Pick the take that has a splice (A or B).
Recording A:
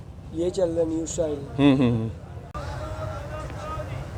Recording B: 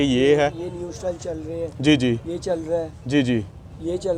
A